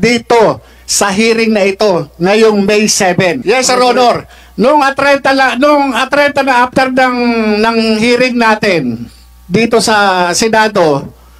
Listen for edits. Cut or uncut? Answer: cut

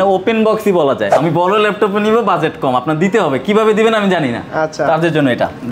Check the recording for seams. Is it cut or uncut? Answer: cut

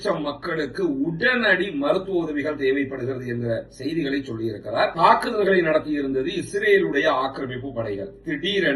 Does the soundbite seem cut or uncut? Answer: cut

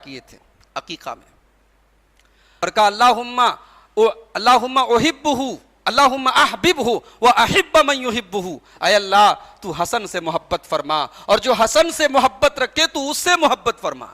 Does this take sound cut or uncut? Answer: cut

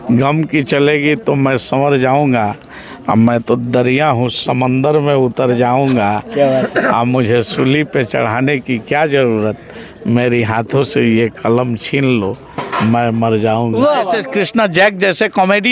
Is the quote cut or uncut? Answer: cut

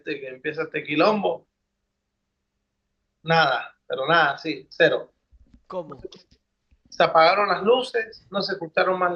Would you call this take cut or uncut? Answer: uncut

